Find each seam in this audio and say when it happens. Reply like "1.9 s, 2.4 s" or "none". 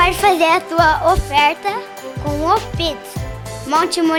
none